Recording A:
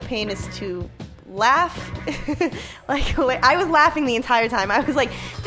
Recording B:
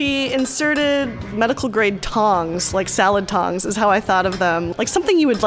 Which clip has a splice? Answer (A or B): B